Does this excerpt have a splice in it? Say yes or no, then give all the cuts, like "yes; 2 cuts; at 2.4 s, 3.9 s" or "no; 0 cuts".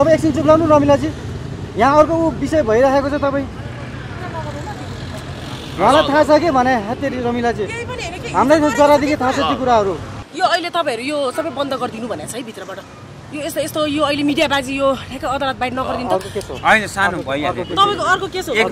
yes; 1 cut; at 10.1 s